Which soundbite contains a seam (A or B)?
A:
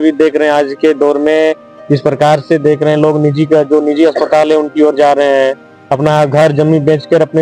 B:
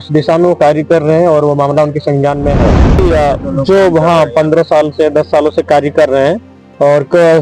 B